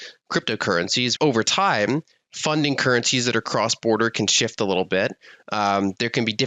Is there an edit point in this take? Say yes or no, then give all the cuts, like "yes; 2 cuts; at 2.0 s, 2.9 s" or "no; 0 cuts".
yes; 1 cut; at 1.1 s